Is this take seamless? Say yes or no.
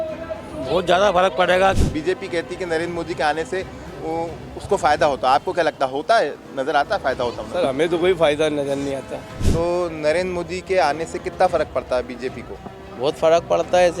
no